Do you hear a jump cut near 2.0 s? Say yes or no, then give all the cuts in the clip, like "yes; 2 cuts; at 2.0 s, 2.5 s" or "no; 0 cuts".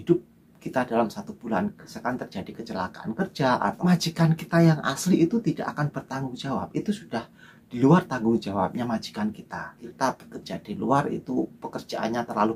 yes; 3 cuts; at 2.0 s, 3.8 s, 9.8 s